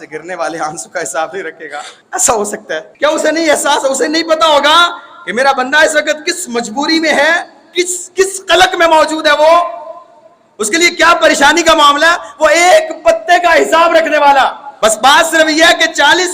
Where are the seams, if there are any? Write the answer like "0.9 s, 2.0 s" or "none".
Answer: 1.9 s, 2.9 s, 14.6 s